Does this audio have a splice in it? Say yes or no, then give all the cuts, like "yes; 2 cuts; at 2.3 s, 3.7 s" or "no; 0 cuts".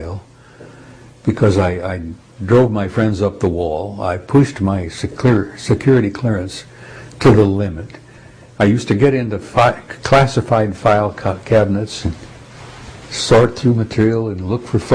no; 0 cuts